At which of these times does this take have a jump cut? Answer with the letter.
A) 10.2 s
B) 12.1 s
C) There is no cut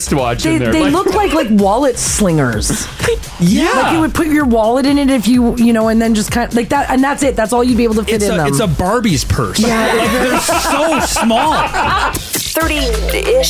B